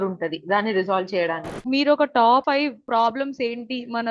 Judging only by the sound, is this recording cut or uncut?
cut